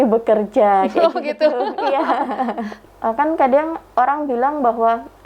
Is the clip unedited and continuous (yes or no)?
no